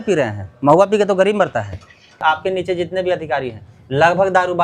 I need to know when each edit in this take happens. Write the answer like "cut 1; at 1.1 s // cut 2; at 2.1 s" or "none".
cut 1; at 2.2 s